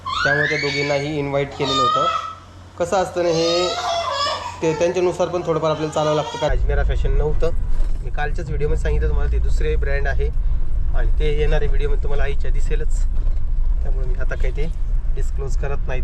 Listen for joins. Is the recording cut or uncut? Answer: cut